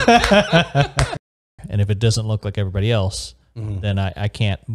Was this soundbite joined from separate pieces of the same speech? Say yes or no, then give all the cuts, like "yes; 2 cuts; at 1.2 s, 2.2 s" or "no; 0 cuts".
yes; 1 cut; at 1.2 s